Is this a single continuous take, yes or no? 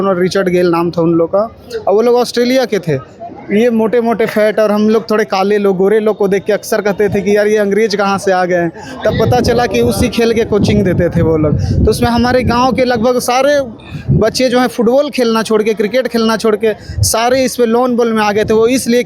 yes